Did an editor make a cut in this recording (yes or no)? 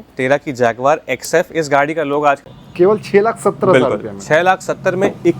yes